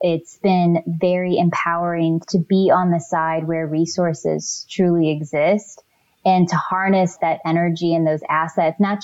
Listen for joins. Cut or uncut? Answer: cut